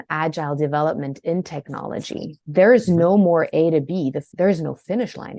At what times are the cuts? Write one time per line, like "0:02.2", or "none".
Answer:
0:02.4
0:04.2